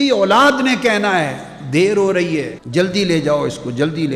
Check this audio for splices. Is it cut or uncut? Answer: uncut